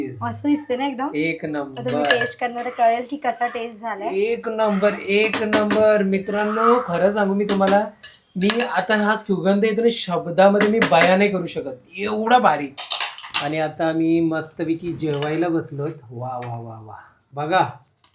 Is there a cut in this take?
yes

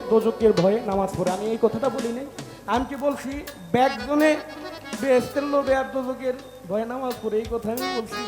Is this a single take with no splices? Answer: yes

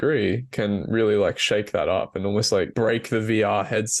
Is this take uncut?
no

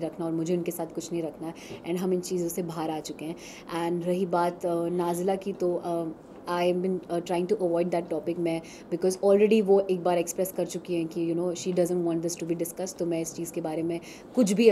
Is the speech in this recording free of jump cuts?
yes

